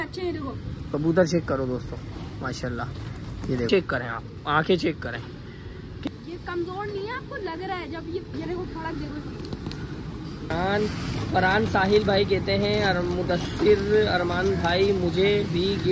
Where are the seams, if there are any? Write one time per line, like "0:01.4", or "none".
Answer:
0:03.7
0:06.1
0:10.5